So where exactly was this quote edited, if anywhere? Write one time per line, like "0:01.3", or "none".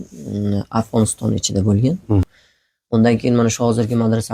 0:02.4